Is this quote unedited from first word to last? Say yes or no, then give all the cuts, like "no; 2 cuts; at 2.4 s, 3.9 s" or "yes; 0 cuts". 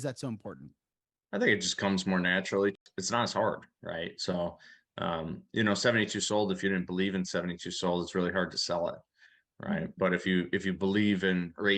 no; 1 cut; at 2.8 s